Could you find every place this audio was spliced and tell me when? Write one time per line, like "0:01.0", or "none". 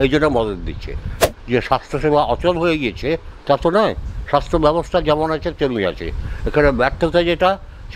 0:01.2